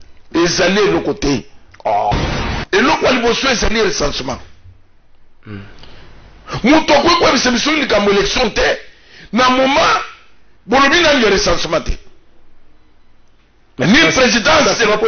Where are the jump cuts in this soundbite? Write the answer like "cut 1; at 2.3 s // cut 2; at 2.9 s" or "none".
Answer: cut 1; at 2.1 s